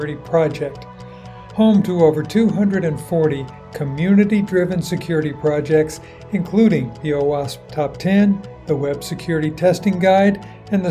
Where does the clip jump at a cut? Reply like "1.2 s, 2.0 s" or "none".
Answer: none